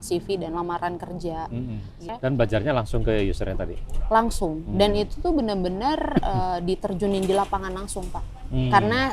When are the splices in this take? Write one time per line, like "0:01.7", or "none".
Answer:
0:02.1